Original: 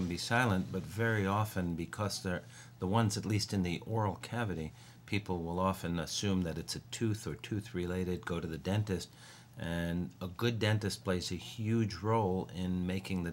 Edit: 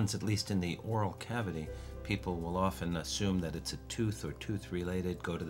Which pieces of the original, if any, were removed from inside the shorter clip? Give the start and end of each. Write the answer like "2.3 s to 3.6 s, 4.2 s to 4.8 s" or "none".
none